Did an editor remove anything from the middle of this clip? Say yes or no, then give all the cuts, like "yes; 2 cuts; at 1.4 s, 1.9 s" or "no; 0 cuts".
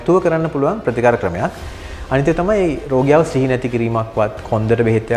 no; 0 cuts